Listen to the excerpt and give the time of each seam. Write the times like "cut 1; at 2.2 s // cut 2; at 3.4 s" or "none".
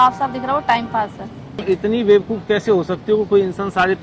cut 1; at 1.6 s

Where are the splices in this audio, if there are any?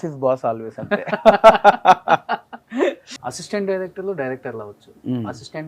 cut 1; at 3.1 s

